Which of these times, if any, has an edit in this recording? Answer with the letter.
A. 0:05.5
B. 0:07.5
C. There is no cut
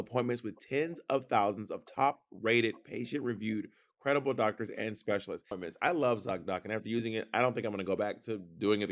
A